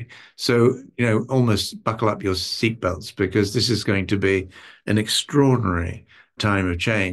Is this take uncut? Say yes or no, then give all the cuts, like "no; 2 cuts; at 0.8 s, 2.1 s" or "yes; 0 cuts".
yes; 0 cuts